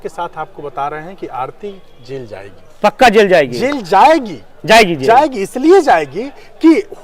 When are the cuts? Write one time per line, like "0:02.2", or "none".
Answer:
none

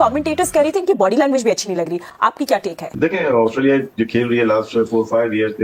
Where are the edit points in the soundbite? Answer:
none

